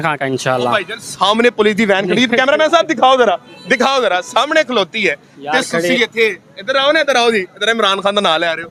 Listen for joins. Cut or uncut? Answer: uncut